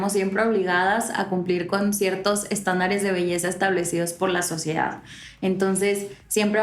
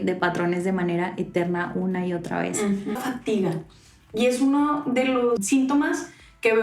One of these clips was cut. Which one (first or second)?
second